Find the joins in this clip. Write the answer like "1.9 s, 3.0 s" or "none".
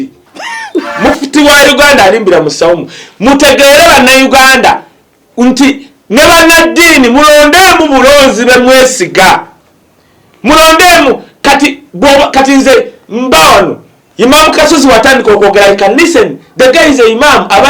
0.9 s